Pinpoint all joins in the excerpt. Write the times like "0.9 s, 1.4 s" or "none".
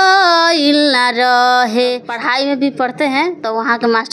2.1 s